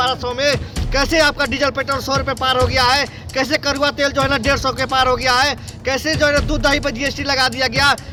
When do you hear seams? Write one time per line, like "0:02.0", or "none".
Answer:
none